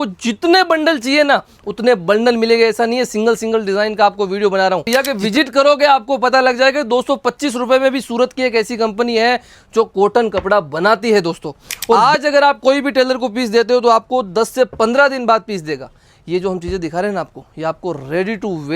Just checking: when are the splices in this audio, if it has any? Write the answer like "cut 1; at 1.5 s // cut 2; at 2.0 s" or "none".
cut 1; at 4.9 s // cut 2; at 12.0 s